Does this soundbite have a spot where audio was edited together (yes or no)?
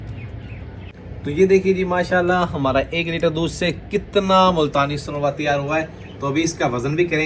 yes